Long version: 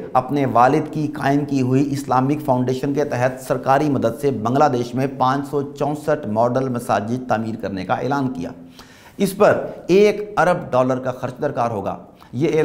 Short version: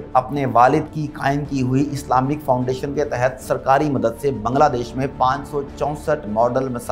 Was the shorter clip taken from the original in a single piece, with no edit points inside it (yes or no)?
yes